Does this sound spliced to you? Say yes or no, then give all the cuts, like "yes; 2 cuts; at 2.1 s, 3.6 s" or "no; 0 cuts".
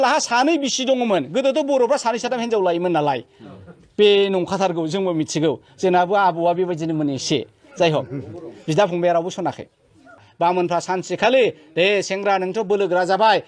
yes; 1 cut; at 10.3 s